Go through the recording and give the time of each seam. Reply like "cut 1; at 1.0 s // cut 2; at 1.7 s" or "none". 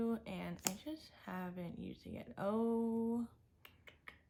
none